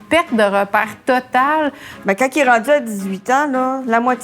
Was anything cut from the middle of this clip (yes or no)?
yes